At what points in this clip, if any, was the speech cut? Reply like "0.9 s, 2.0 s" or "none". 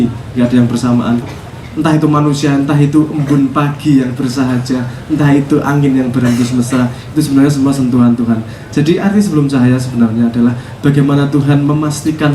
1.3 s